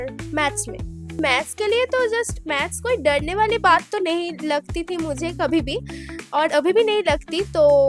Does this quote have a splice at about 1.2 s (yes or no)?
yes